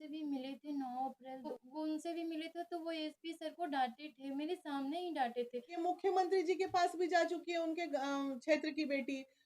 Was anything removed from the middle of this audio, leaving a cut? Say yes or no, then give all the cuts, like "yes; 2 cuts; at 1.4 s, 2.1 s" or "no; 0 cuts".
yes; 2 cuts; at 1.6 s, 5.8 s